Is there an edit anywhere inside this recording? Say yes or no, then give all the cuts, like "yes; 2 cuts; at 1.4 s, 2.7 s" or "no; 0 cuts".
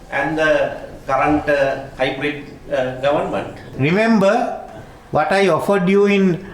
yes; 2 cuts; at 1.9 s, 3.6 s